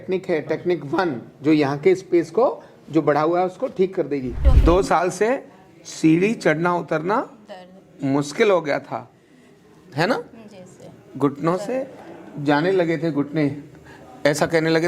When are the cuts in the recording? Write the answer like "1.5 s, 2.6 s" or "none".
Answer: 4.4 s